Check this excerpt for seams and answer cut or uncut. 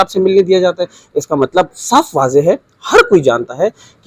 uncut